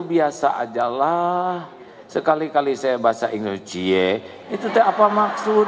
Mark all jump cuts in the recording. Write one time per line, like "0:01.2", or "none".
none